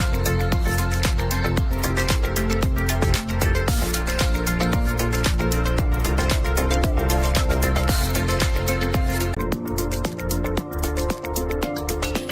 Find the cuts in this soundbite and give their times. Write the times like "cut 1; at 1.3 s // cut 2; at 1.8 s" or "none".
cut 1; at 9.3 s